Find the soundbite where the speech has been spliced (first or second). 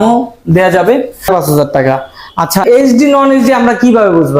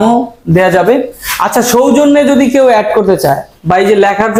first